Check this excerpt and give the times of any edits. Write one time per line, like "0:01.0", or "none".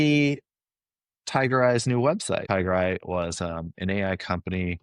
0:02.4